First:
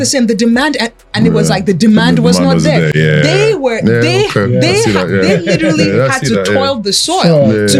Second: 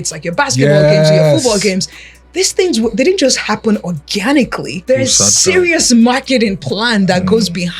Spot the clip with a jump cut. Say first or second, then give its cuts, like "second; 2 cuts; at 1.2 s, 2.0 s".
second; 1 cut; at 4.8 s